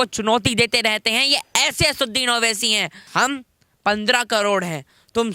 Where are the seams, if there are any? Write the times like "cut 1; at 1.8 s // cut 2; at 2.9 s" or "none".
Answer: cut 1; at 3.1 s